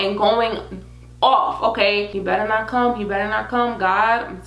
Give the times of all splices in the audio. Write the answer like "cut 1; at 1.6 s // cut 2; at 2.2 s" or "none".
cut 1; at 2.1 s